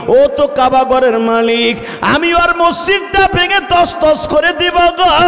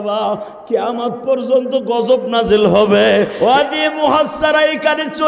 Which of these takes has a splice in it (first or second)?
second